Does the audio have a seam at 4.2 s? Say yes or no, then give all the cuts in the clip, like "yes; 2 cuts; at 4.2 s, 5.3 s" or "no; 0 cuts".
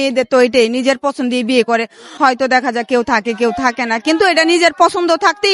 no; 1 cut; at 2.0 s